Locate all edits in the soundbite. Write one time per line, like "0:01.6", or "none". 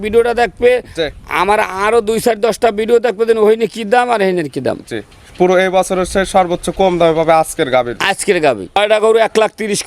0:08.8